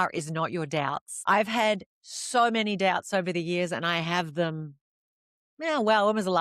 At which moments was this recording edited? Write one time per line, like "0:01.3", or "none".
0:01.1